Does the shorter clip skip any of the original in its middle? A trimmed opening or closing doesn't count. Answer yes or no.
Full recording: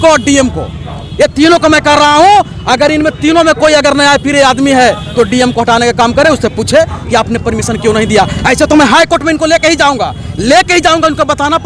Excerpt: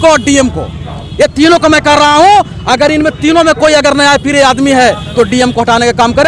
no